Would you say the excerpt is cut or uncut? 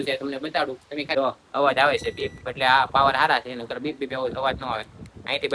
cut